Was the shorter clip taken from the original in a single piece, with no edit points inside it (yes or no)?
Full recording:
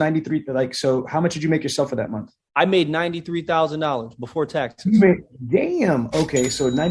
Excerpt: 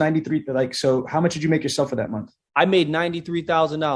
yes